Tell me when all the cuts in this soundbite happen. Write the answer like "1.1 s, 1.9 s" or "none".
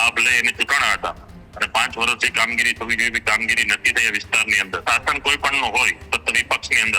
4.8 s